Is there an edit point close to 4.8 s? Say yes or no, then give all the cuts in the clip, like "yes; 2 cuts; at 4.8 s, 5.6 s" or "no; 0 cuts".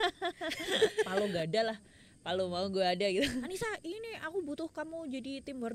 no; 2 cuts; at 1.1 s, 3.5 s